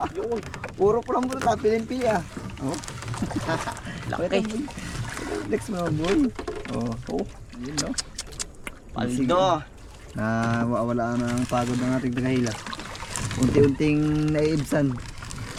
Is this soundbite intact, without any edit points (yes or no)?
yes